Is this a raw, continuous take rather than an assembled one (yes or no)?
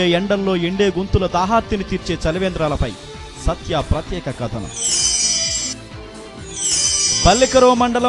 no